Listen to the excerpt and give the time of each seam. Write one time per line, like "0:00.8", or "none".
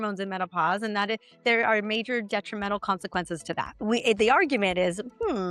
0:03.7